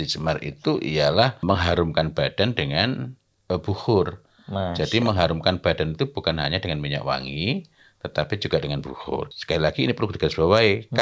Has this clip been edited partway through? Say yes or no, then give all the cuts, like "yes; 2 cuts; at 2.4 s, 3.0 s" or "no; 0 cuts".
yes; 2 cuts; at 1.4 s, 9.3 s